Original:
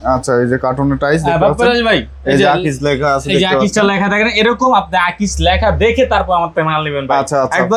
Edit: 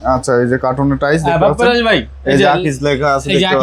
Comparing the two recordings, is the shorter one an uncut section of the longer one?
yes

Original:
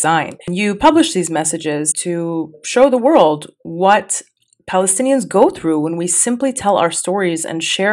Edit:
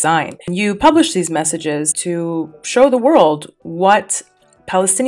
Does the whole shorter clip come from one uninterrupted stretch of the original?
yes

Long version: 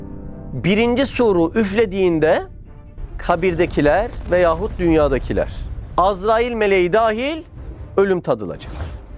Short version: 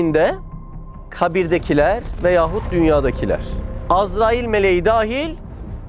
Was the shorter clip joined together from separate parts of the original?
no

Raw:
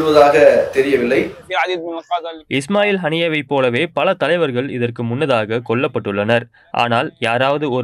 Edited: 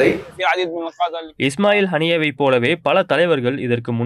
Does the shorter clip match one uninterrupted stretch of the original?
yes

